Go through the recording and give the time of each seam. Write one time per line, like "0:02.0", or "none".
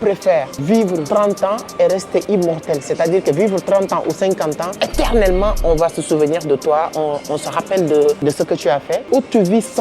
0:00.9
0:04.7
0:08.5